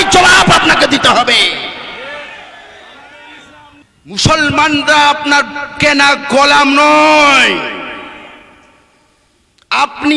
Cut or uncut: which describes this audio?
cut